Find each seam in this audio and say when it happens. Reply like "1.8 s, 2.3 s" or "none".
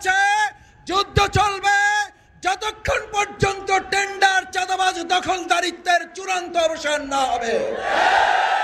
none